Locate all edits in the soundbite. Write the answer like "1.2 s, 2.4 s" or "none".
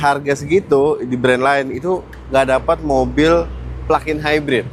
none